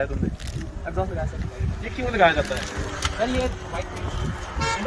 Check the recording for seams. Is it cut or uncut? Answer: uncut